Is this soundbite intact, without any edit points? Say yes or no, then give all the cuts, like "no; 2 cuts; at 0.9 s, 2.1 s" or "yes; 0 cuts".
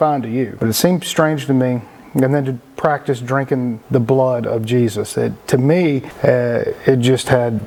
yes; 0 cuts